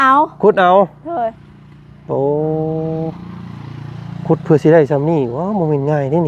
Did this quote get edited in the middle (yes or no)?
no